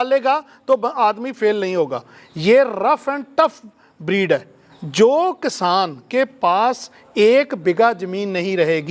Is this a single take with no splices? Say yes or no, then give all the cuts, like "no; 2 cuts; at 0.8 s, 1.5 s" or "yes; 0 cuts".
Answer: no; 1 cut; at 4.6 s